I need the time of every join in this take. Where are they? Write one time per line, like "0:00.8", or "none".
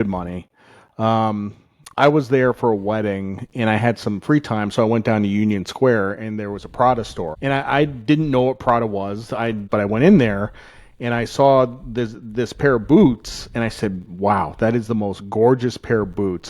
0:07.3
0:09.6